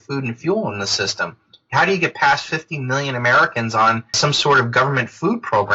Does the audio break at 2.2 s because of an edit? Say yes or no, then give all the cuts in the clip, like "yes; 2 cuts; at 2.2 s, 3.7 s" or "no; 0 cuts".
no; 1 cut; at 4.1 s